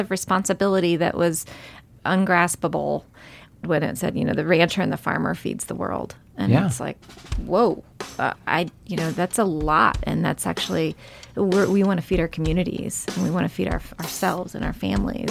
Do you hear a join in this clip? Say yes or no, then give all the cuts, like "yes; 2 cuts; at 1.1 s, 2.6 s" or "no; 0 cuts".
yes; 3 cuts; at 1.8 s, 3.6 s, 8.3 s